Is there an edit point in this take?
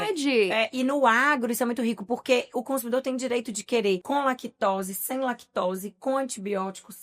yes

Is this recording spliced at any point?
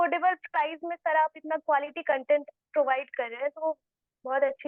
no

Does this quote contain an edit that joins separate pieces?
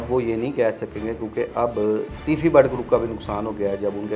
yes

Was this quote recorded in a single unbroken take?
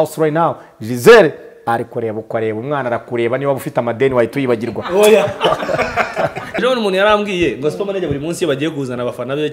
no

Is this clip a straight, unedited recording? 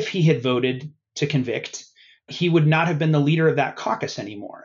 yes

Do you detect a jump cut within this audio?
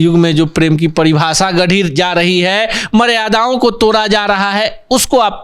no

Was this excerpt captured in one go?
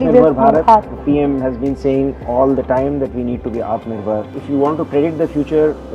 no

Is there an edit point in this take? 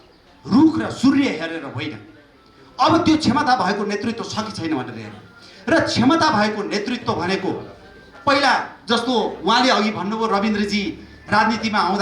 no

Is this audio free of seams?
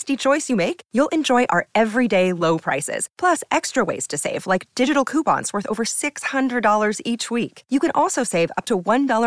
yes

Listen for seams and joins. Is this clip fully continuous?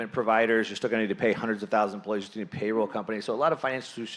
yes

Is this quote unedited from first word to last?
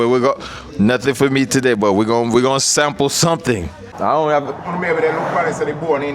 no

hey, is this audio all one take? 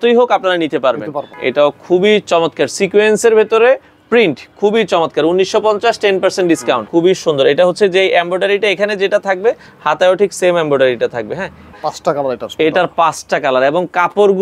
no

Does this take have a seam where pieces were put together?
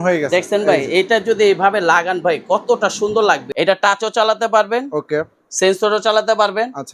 yes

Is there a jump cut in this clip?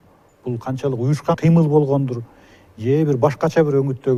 no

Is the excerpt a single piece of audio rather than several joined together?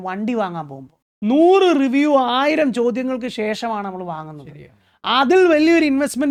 yes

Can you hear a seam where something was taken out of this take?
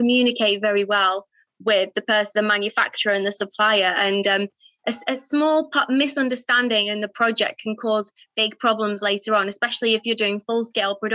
no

